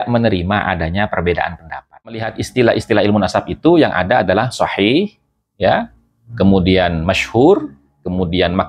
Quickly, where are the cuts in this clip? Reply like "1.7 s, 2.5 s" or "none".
2.4 s